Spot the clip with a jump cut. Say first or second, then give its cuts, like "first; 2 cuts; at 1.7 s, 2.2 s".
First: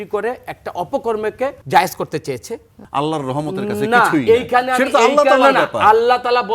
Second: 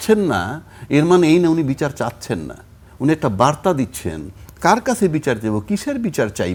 first; 2 cuts; at 1.6 s, 2.8 s